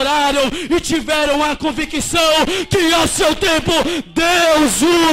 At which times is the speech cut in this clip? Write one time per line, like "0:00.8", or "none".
none